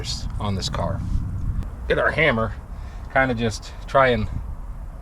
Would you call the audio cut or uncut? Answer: cut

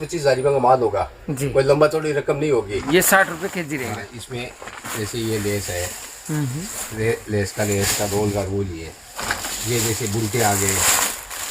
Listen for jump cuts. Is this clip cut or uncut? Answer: cut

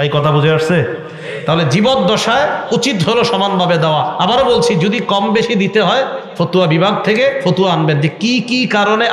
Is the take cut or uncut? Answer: uncut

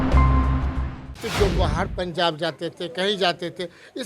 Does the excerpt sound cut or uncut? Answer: cut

